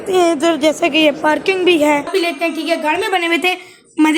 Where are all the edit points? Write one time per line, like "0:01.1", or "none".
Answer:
0:02.1

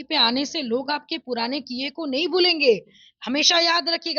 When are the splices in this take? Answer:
none

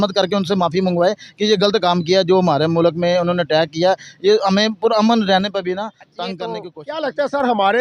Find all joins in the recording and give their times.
0:06.5

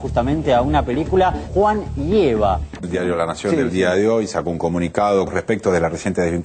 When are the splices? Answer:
0:01.4
0:02.7

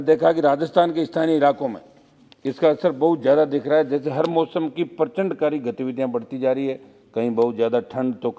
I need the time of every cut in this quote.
none

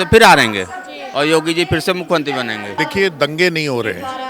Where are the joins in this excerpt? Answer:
0:02.7

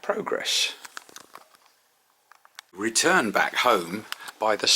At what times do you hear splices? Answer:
0:02.7

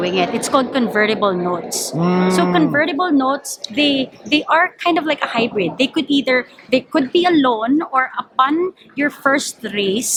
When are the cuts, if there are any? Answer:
none

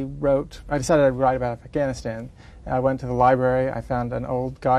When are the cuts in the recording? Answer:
none

